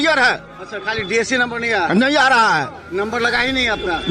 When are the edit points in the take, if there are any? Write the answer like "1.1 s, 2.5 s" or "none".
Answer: none

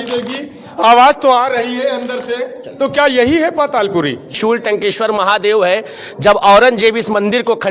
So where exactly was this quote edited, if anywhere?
4.4 s

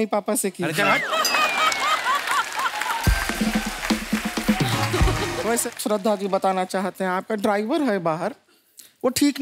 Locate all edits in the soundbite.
5.4 s

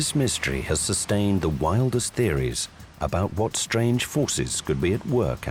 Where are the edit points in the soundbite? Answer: none

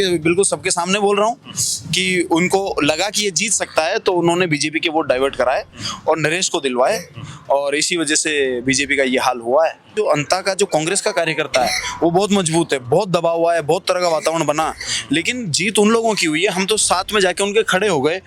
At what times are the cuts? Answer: 9.9 s

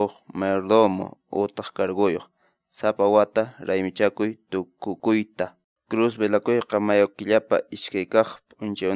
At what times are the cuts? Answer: 5.7 s

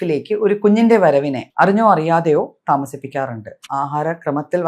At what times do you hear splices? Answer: 1.4 s, 3.6 s

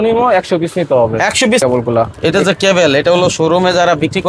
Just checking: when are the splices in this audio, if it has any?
1.6 s

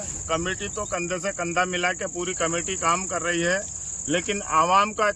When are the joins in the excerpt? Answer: none

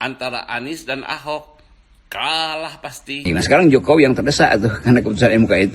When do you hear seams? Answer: 3.2 s

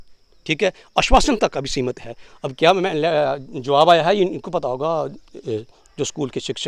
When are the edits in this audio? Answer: none

